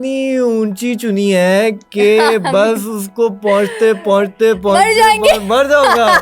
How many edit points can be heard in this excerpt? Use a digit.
0